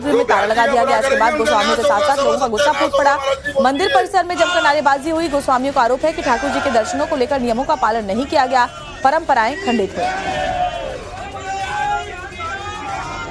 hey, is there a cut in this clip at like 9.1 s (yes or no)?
yes